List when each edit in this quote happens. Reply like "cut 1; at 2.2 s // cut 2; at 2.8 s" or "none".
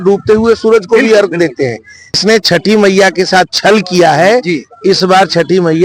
cut 1; at 2.1 s